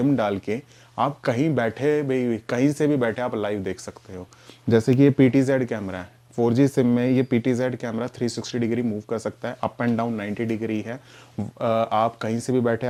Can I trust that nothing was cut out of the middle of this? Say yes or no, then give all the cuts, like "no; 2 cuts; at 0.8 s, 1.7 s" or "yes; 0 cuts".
yes; 0 cuts